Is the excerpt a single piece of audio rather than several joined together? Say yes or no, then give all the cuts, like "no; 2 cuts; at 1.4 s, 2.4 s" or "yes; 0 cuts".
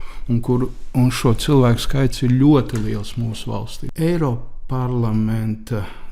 no; 1 cut; at 3.8 s